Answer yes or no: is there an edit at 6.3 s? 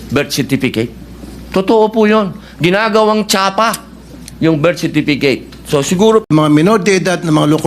yes